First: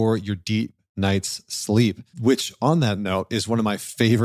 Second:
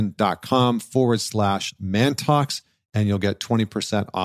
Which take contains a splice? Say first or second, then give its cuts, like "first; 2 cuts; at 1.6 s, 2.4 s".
first; 1 cut; at 2.1 s